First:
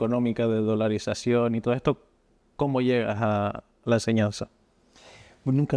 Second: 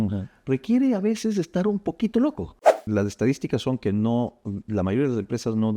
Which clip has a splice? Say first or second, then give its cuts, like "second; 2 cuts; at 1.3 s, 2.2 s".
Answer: second; 1 cut; at 2.8 s